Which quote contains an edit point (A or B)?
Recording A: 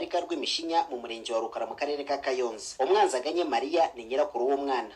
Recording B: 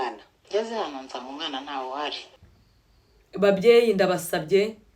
B